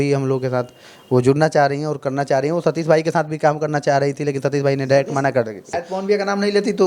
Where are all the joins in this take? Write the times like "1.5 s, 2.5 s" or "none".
5.7 s